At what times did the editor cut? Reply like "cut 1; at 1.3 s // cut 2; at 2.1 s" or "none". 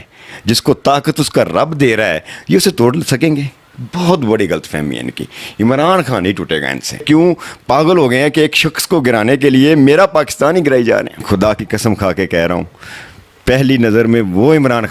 cut 1; at 7.0 s // cut 2; at 11.2 s